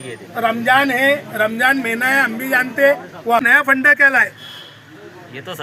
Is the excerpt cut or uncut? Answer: cut